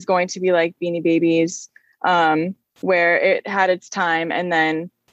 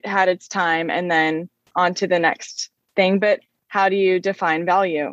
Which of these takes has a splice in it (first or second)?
second